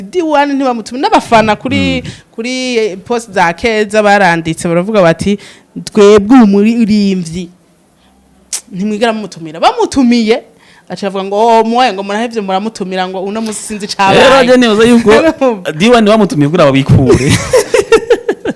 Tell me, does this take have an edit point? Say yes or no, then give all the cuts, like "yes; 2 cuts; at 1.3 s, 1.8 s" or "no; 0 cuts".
no; 0 cuts